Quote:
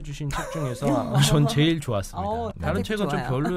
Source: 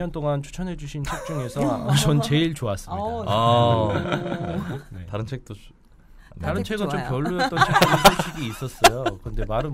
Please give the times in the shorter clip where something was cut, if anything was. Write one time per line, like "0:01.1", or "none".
0:02.5